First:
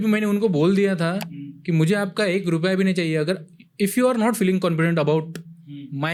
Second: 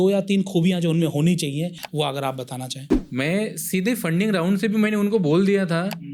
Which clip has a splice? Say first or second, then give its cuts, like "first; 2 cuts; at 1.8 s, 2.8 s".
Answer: second; 2 cuts; at 1.8 s, 2.9 s